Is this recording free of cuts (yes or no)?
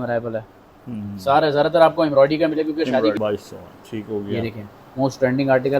no